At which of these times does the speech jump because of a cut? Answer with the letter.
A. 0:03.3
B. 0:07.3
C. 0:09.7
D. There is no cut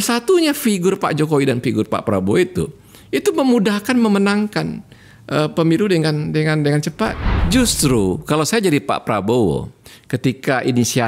B